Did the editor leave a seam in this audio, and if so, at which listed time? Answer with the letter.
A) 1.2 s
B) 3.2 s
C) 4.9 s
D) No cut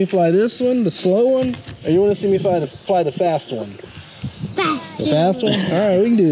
D